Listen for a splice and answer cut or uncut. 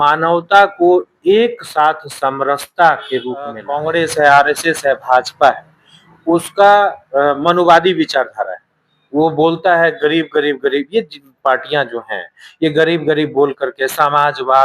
cut